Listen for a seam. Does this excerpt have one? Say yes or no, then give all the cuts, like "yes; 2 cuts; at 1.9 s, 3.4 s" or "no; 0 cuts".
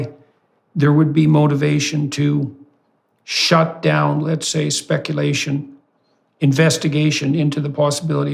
no; 0 cuts